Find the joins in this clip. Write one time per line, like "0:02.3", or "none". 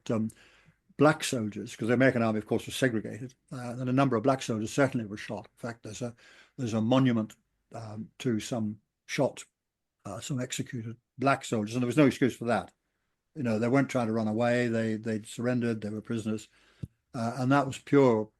0:11.0